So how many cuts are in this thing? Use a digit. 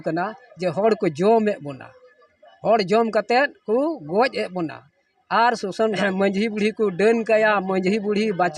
1